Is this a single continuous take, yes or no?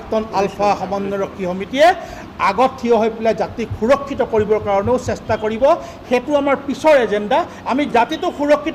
yes